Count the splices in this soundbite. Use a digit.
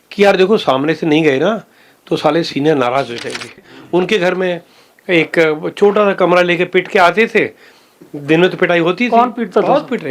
1